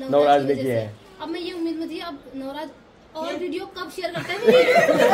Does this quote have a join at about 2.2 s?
no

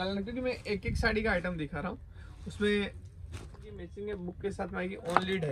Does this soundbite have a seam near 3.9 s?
yes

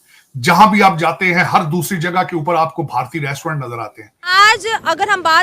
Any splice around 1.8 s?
no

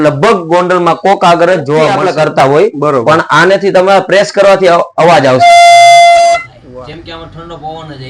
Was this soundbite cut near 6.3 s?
yes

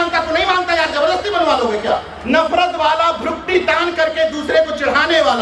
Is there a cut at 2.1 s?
yes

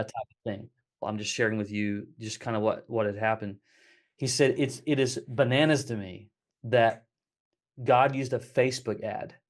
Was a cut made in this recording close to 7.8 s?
no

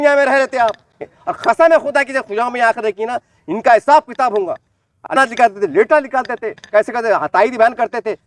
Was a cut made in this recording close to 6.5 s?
no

